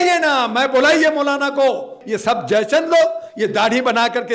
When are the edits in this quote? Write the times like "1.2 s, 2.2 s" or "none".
1.9 s